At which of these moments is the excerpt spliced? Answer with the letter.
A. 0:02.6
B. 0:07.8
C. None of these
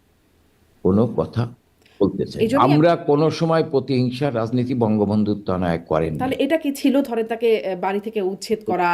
A